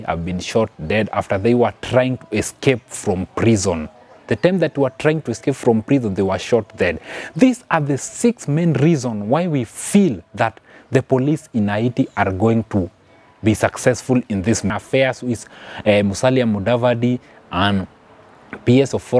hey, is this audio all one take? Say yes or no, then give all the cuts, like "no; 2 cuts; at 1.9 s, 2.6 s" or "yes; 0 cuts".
no; 1 cut; at 14.7 s